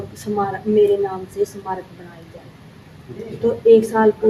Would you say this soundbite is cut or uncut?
uncut